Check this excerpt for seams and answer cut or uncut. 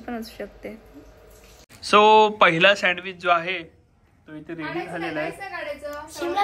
cut